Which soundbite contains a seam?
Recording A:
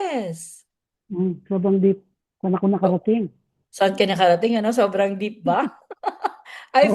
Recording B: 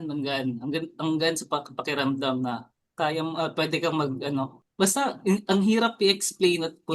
B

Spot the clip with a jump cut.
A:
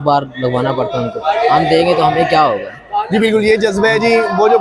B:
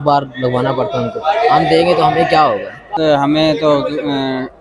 B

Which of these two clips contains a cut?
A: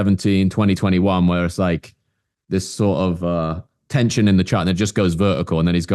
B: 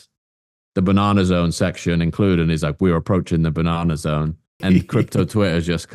B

